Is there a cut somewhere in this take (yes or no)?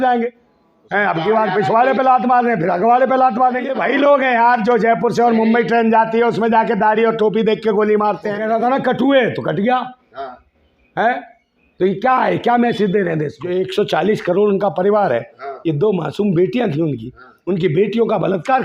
yes